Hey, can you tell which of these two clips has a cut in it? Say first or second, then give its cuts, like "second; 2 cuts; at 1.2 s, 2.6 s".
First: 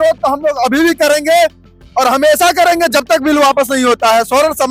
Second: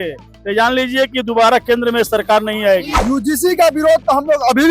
second; 1 cut; at 2.9 s